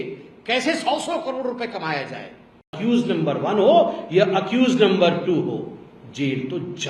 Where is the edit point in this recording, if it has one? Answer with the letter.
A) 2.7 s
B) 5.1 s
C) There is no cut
A